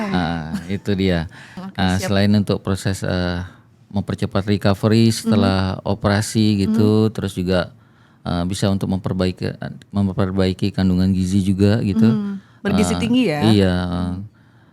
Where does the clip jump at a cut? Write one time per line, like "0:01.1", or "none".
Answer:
0:01.6

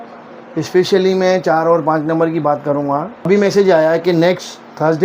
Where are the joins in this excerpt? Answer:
0:03.3

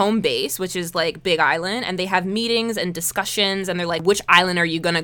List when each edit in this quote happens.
0:04.0

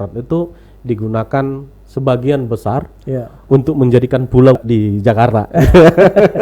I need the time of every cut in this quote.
0:04.6

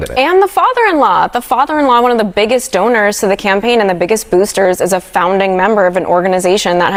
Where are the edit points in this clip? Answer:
none

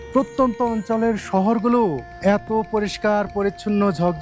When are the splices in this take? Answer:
0:02.1

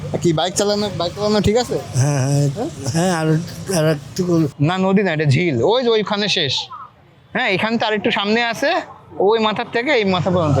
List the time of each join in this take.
0:04.5

